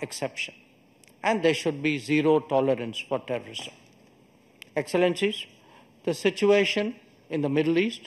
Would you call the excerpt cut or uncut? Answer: uncut